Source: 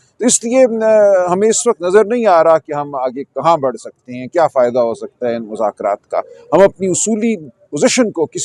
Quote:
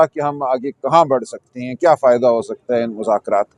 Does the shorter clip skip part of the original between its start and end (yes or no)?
no